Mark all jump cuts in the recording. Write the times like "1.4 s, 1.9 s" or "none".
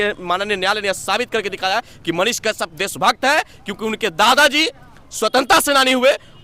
none